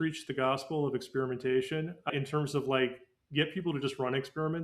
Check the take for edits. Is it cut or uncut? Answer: cut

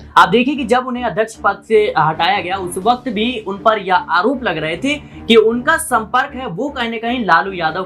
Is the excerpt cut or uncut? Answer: uncut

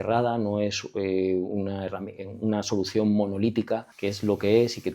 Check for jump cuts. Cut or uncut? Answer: cut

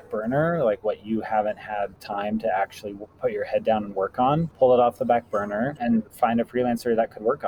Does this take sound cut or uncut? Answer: cut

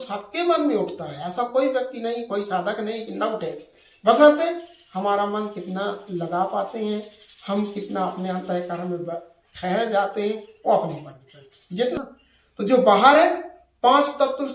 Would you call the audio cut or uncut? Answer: cut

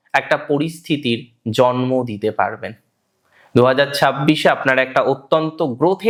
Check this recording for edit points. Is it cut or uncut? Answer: uncut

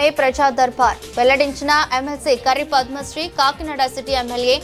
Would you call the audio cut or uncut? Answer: uncut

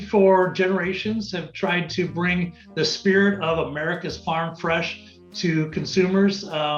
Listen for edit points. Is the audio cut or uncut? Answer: uncut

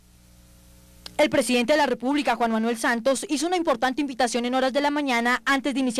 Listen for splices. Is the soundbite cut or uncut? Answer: uncut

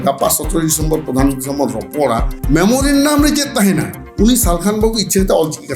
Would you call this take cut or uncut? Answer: uncut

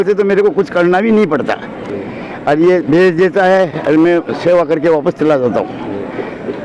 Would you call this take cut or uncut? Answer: uncut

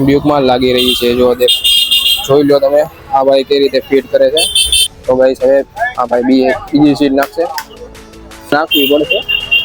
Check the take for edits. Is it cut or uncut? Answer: uncut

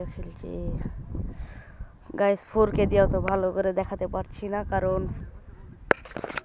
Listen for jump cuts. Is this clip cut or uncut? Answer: cut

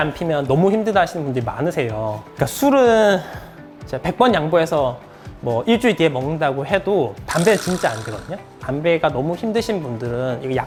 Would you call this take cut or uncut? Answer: uncut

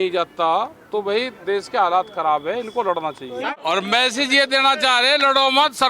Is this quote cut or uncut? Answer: cut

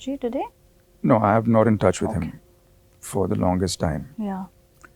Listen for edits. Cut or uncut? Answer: uncut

